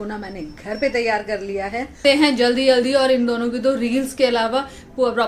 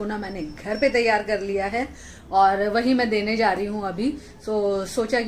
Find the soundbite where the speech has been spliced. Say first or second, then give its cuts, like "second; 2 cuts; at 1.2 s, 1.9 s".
first; 1 cut; at 2.0 s